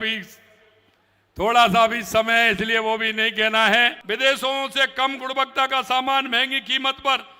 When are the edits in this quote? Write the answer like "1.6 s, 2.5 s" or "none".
4.0 s